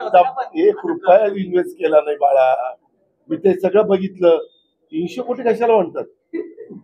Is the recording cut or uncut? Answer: uncut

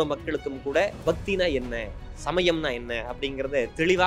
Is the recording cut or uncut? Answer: uncut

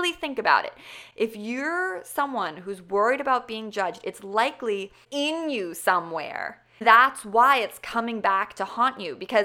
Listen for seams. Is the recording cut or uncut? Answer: cut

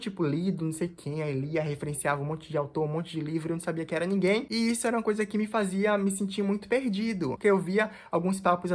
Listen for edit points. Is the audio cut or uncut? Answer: cut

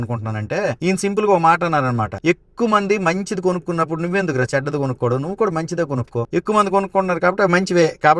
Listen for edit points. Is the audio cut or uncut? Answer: cut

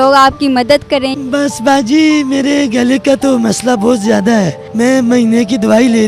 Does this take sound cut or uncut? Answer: cut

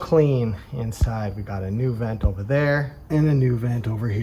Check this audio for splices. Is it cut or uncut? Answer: cut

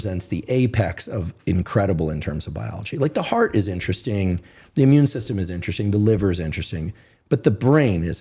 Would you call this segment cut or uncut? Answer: uncut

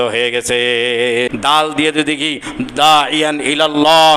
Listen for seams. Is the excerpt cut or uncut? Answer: cut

